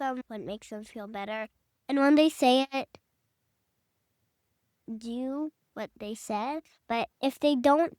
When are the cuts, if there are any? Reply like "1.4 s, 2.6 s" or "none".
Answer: 6.7 s